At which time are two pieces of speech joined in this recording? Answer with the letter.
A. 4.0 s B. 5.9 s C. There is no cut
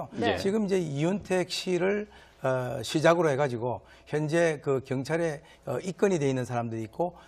B